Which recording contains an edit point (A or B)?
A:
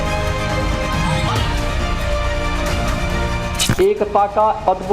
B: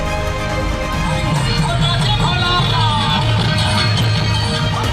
A